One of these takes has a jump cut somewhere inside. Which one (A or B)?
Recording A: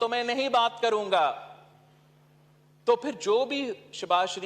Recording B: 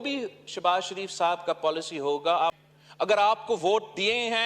B